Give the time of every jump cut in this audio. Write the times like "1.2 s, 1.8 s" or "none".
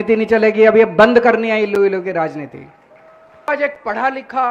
3.5 s